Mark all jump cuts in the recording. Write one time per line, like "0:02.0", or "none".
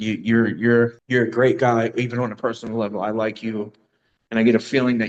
0:01.0